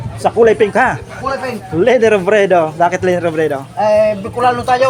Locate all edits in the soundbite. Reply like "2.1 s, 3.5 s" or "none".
none

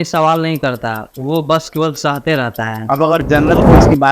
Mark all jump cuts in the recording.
2.8 s

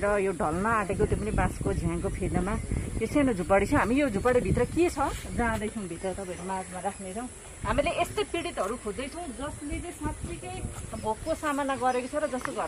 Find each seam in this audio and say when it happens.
none

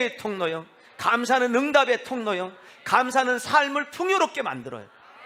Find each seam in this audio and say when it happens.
none

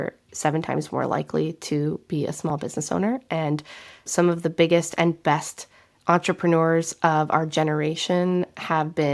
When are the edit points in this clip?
none

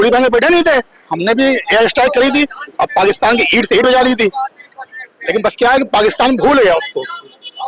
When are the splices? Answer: none

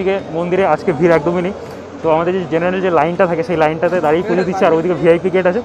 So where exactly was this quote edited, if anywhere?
none

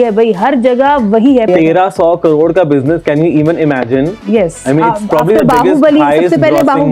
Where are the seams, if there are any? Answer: 1.5 s

